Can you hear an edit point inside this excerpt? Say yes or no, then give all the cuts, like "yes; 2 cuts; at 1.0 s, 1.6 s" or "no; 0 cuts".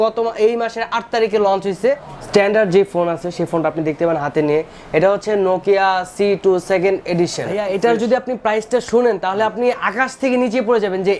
yes; 2 cuts; at 2.1 s, 7.7 s